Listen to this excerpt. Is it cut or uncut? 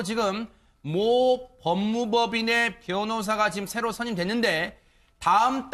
uncut